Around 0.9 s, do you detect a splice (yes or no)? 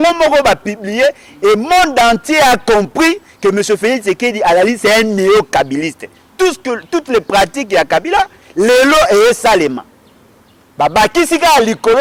no